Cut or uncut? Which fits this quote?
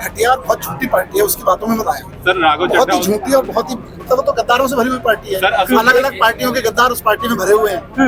uncut